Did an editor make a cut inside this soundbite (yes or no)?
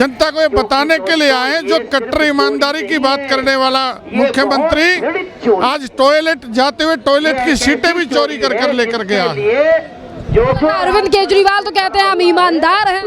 no